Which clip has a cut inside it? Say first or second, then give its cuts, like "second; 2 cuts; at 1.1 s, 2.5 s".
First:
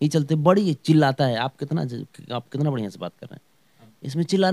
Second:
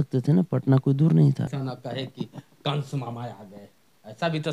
second; 1 cut; at 1.5 s